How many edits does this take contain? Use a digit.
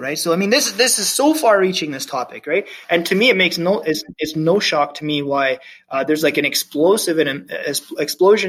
0